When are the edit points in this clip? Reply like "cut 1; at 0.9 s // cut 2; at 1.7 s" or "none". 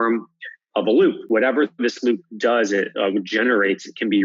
cut 1; at 1.2 s